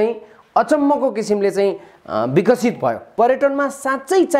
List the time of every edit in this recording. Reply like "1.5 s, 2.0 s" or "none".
3.1 s